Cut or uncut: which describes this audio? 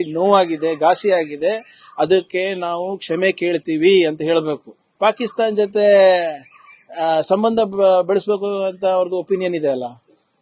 cut